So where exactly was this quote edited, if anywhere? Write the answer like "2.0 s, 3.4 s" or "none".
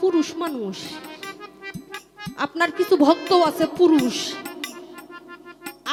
none